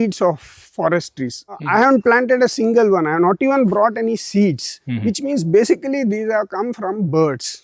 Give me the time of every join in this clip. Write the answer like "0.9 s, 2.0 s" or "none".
1.6 s